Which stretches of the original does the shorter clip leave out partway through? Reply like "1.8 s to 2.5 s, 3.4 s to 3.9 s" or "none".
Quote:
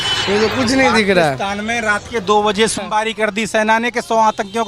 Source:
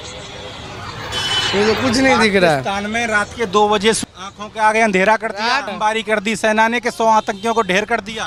4.1 s to 5.7 s